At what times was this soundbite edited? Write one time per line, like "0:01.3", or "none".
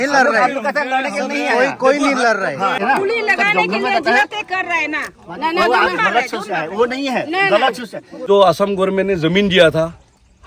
0:02.8
0:08.2